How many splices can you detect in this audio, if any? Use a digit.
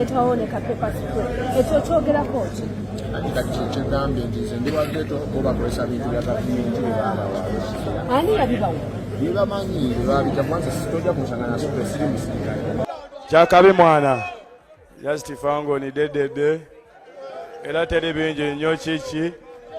1